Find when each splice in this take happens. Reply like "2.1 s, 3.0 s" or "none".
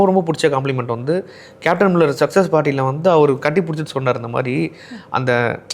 none